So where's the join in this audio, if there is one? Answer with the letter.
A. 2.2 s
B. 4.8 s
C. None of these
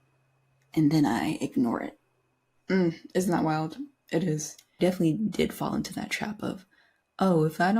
B